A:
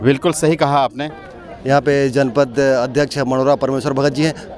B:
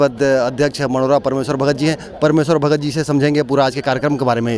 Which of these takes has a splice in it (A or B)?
A